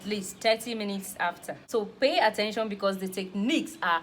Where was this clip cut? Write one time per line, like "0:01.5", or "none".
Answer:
0:01.5